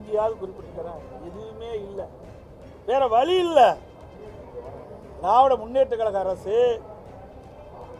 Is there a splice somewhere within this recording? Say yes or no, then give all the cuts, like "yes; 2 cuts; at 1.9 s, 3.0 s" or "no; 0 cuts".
no; 0 cuts